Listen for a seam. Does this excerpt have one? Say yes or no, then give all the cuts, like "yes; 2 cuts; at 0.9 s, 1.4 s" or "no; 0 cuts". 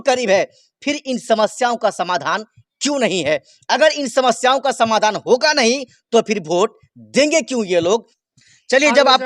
yes; 1 cut; at 8.2 s